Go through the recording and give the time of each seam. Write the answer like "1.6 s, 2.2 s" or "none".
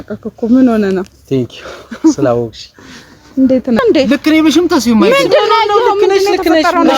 3.8 s